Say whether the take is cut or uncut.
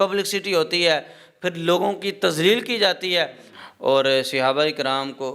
cut